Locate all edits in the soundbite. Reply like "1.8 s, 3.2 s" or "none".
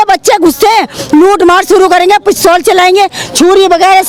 none